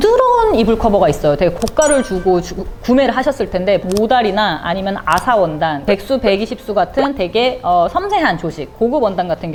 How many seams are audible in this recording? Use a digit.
0